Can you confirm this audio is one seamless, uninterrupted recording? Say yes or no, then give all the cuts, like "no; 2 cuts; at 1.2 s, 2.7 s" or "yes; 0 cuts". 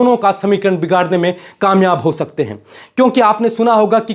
yes; 0 cuts